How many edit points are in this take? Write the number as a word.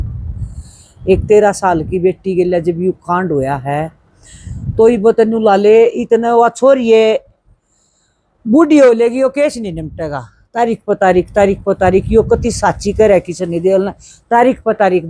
zero